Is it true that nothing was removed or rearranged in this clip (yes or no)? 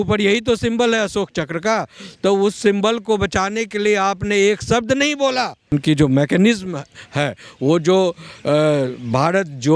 no